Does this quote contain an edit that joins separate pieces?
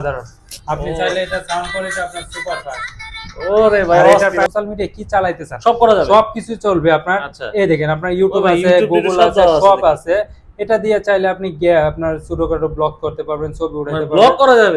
yes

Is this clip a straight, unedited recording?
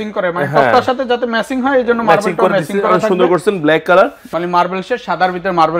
no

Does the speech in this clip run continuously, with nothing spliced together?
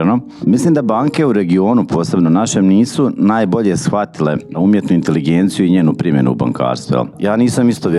no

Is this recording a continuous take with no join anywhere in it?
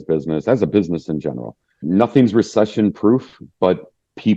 no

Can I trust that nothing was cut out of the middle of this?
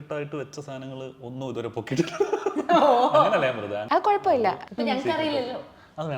no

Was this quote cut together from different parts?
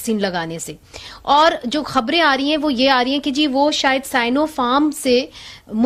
no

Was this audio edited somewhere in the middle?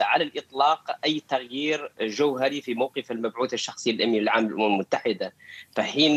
no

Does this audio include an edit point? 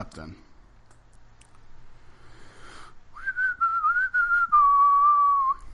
no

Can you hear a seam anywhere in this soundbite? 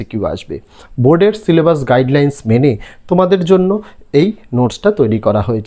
no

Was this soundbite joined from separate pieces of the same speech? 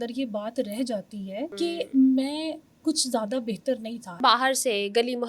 yes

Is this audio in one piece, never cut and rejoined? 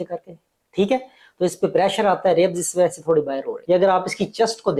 no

